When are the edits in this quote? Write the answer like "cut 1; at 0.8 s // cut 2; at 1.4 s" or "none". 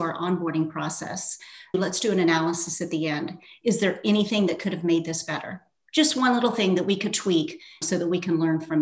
cut 1; at 1.7 s // cut 2; at 7.8 s